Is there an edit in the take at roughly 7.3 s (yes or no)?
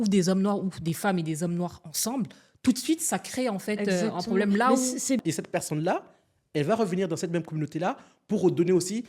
no